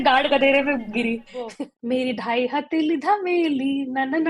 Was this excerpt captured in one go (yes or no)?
no